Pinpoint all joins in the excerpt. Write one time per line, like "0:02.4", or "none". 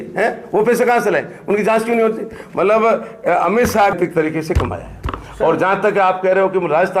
0:04.0